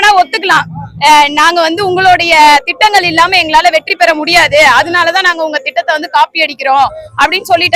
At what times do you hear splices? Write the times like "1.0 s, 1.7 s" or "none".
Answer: none